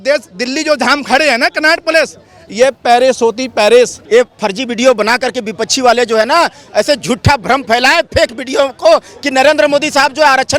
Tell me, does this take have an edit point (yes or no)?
yes